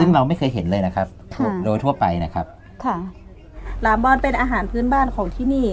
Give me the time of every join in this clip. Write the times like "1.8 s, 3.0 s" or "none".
3.6 s